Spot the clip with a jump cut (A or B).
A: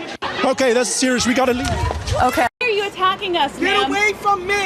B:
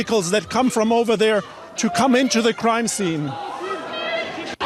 A